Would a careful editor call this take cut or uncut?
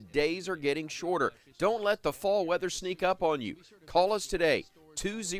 uncut